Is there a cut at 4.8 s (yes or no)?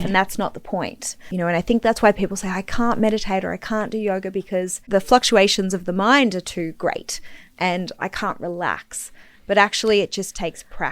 yes